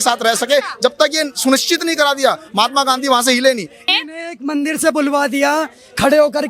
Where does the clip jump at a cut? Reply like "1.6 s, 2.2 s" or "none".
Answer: 3.8 s